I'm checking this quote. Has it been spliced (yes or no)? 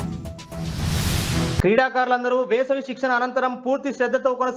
yes